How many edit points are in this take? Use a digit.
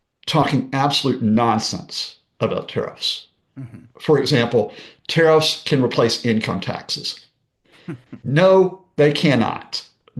0